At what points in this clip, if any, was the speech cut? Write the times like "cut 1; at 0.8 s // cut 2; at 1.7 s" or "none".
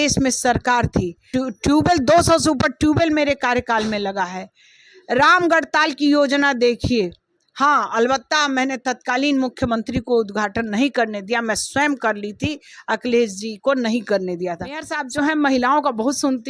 cut 1; at 1.3 s // cut 2; at 15.0 s